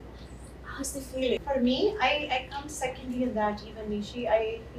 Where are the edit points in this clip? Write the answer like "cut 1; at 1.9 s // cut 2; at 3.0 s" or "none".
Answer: cut 1; at 1.4 s

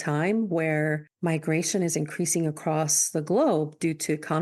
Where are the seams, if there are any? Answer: cut 1; at 1.1 s

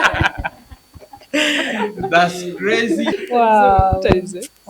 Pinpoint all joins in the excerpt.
cut 1; at 3.2 s

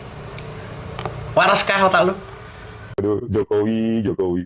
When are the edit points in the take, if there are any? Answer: cut 1; at 2.9 s

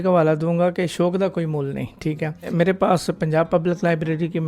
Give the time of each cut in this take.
cut 1; at 2.5 s

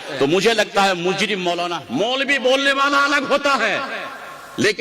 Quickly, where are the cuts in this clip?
cut 1; at 1.7 s

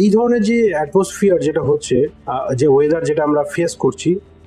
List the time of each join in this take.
none

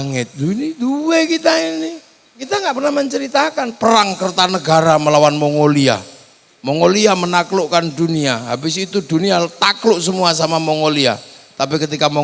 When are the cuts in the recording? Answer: cut 1; at 2.4 s

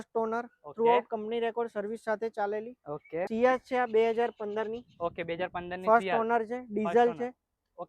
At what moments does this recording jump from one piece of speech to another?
cut 1; at 3.3 s

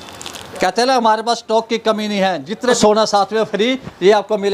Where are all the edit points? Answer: cut 1; at 2.8 s

